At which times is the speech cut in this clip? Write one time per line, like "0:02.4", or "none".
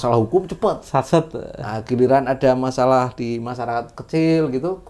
none